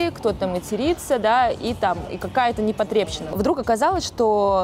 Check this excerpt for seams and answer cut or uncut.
cut